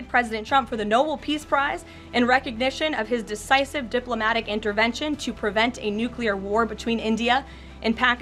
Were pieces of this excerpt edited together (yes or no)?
no